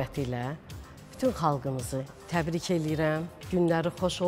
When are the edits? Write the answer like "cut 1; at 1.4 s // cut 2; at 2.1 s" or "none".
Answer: cut 1; at 2.2 s // cut 2; at 3.4 s